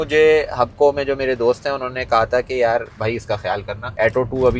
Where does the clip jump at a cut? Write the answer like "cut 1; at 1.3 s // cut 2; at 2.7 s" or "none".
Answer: cut 1; at 3.3 s

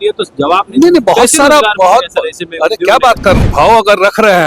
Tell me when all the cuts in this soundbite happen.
cut 1; at 3.5 s

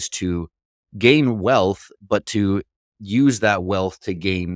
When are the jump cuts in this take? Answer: none

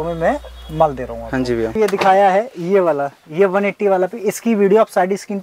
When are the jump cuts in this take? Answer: cut 1; at 1.8 s

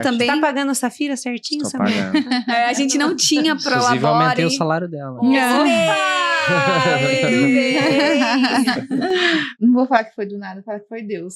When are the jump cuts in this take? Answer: cut 1; at 9.5 s

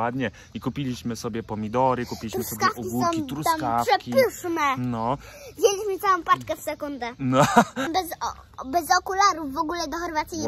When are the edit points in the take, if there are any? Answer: cut 1; at 7.9 s

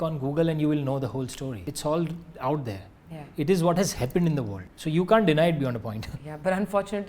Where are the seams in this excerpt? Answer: cut 1; at 1.6 s

